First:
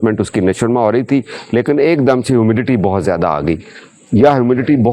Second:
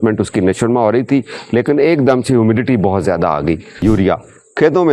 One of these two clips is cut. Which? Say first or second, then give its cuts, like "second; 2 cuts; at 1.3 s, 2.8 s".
second; 1 cut; at 3.8 s